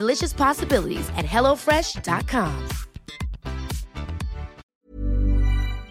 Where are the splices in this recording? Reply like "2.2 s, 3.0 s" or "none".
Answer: 4.6 s

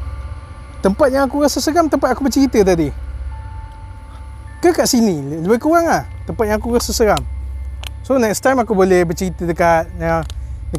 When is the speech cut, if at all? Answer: 3.2 s, 4.6 s

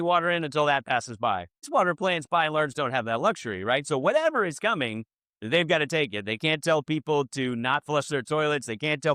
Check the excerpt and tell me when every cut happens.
1.5 s

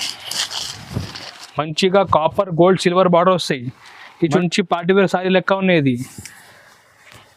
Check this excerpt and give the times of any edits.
4.4 s

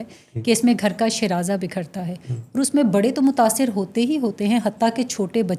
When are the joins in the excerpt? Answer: none

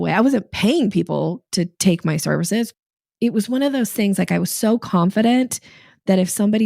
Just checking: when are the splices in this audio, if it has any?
1.4 s, 2.7 s

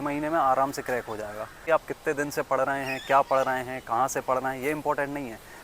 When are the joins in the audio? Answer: 1.6 s

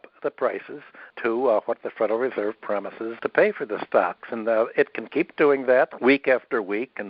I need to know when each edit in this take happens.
1.1 s, 3.1 s, 5.9 s

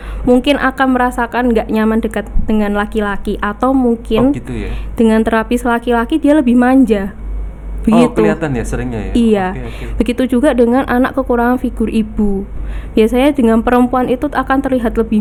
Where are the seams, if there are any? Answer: none

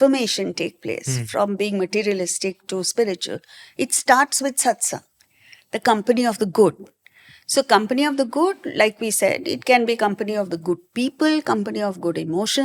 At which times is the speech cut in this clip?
none

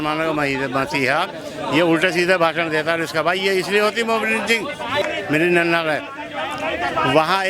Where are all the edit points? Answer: 5.0 s

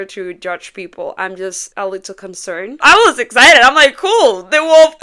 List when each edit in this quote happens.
2.8 s

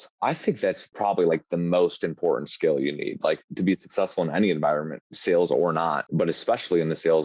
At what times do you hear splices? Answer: 0.9 s, 6.0 s

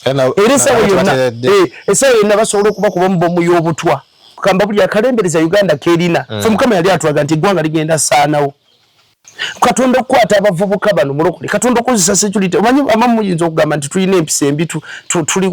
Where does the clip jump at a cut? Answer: 4.3 s

